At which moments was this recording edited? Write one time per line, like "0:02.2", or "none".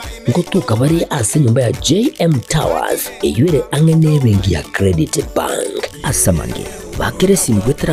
none